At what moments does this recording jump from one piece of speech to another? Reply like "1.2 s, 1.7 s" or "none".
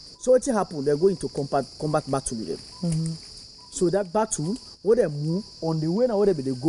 none